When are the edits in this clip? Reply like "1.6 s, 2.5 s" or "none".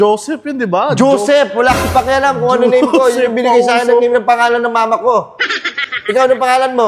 none